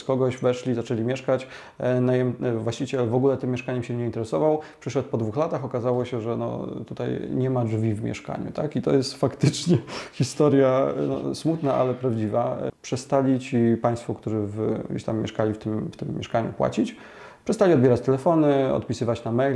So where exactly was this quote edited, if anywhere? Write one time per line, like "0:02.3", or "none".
0:12.7